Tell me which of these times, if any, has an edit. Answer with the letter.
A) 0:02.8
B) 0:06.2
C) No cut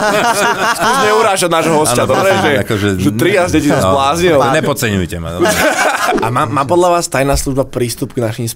B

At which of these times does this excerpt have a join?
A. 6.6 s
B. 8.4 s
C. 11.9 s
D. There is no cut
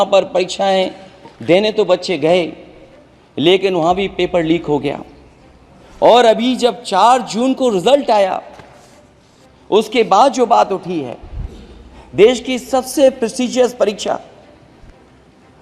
D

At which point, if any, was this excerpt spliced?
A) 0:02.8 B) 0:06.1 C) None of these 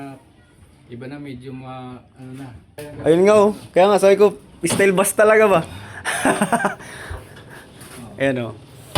A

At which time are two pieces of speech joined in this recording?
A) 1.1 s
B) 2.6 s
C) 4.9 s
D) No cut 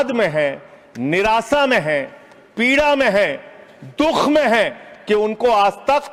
D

